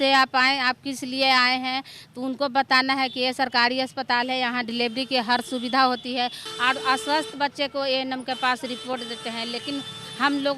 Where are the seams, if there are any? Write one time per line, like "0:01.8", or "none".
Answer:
0:06.4